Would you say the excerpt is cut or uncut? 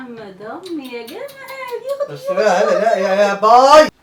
uncut